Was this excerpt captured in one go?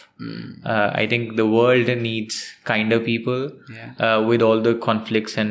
yes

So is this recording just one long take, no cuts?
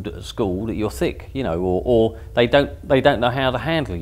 yes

